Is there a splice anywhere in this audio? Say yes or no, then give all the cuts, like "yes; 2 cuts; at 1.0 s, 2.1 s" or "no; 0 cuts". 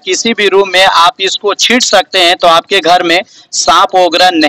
no; 0 cuts